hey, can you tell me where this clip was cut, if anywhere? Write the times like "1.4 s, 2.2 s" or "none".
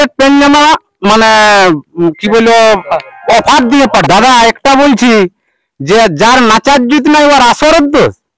4.0 s